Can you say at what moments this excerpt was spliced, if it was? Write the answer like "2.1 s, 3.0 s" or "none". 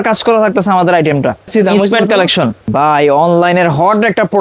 1.5 s, 2.7 s